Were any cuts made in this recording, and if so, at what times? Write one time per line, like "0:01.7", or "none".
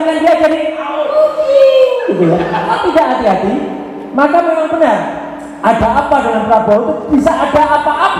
0:02.7